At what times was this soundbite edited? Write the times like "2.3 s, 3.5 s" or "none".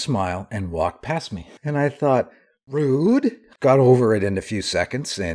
1.6 s